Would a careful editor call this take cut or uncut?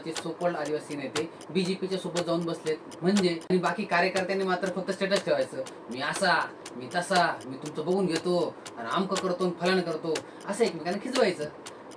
cut